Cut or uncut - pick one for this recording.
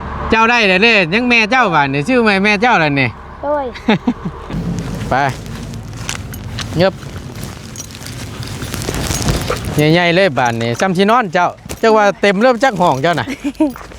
cut